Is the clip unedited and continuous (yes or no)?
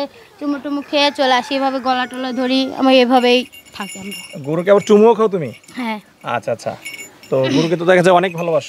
yes